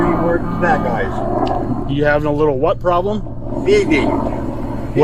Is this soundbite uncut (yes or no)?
yes